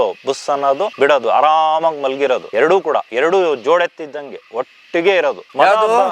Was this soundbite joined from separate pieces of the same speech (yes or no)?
yes